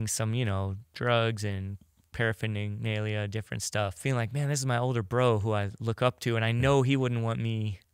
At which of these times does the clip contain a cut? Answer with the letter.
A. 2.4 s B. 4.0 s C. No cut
B